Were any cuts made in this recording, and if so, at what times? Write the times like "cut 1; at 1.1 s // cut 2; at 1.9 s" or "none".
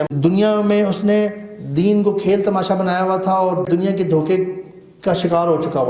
none